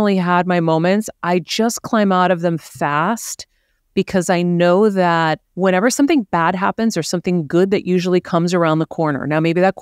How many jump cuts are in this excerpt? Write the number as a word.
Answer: one